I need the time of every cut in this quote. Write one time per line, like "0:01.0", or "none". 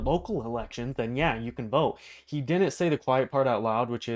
none